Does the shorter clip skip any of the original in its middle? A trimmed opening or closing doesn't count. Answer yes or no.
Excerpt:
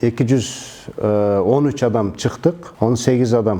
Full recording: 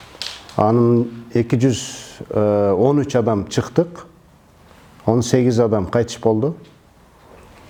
yes